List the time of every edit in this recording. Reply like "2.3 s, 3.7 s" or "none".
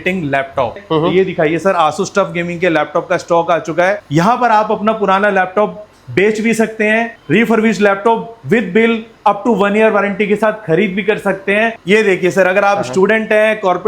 0.8 s, 4.0 s, 11.8 s

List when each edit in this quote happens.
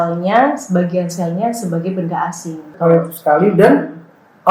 2.6 s

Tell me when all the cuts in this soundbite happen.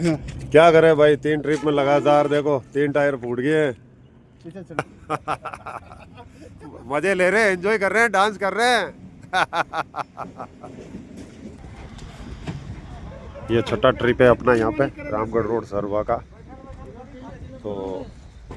4.8 s, 11.6 s

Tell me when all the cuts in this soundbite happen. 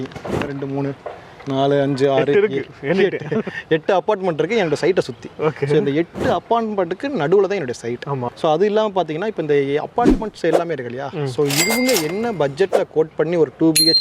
8.2 s

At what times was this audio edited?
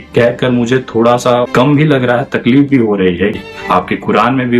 1.5 s, 3.4 s

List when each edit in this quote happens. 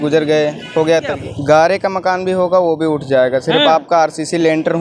1.1 s

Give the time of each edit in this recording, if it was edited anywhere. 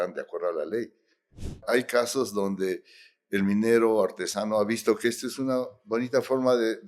1.6 s

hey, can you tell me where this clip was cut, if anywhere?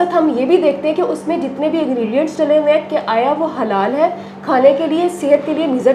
none

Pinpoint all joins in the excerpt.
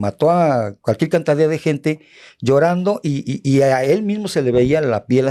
none

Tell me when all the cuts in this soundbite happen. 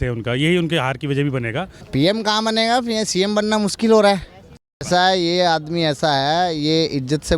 1.8 s, 4.7 s

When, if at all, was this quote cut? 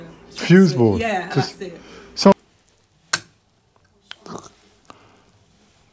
2.3 s

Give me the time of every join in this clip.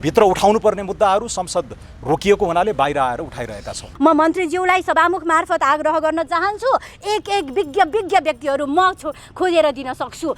3.9 s

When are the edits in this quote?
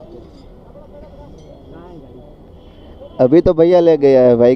1.0 s

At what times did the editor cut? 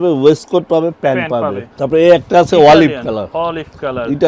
1.7 s

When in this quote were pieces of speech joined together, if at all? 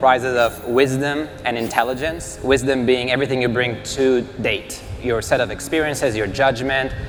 none

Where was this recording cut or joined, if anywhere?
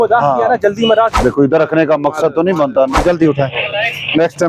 1.2 s, 3.0 s

